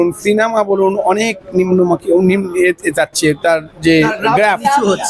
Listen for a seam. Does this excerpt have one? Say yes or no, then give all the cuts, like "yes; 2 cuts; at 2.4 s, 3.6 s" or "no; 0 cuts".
no; 0 cuts